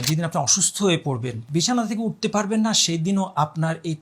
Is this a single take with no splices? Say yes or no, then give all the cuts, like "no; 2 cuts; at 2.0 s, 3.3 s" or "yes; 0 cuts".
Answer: no; 1 cut; at 1.3 s